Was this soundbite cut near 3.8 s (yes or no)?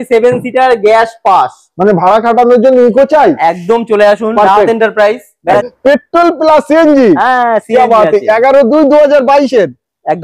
no